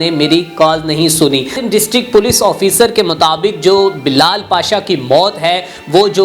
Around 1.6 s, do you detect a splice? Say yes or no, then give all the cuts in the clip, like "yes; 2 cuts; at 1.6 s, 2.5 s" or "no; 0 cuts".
yes; 1 cut; at 1.6 s